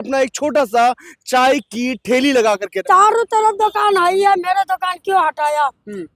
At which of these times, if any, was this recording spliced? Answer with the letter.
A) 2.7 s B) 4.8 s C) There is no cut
A